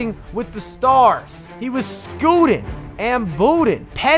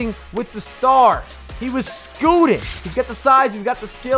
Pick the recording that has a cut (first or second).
second